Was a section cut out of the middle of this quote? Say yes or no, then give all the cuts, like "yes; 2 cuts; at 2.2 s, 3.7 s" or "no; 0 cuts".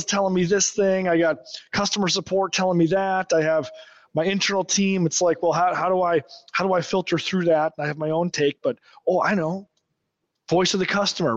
no; 0 cuts